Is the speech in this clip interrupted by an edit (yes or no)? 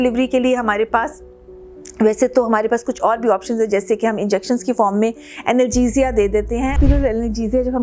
yes